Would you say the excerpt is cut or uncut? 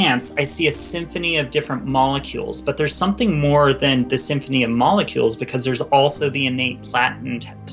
uncut